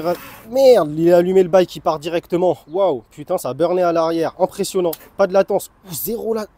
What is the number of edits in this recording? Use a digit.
0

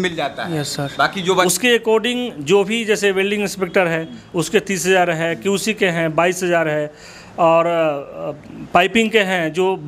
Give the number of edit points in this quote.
1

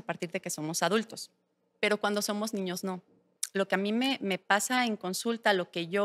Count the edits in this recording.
1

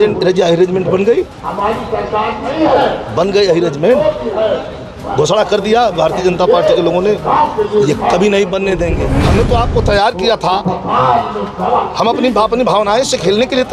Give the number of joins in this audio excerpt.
1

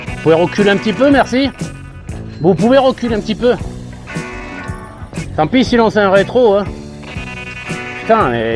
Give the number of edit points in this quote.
0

